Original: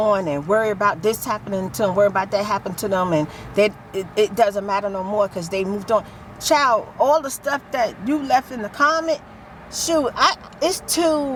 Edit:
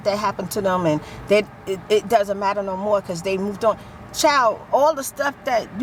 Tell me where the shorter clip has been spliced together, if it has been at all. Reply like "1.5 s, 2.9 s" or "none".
none